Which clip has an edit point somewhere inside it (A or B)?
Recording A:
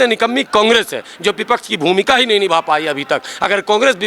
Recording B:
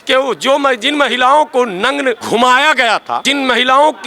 B